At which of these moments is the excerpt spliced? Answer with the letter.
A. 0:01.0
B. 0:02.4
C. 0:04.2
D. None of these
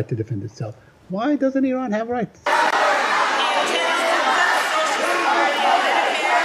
B